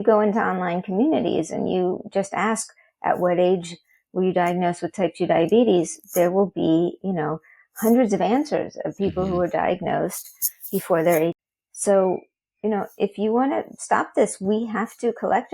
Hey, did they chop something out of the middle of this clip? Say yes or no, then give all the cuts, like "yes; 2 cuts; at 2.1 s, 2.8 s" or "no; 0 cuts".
yes; 1 cut; at 11.4 s